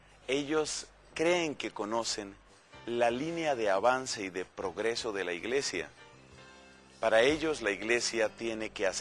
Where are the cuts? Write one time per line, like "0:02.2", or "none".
0:07.1